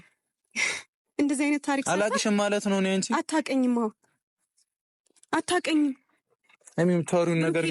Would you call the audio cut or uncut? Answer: uncut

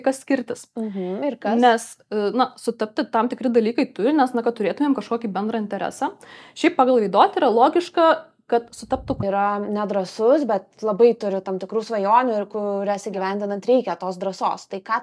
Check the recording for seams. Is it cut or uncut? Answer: cut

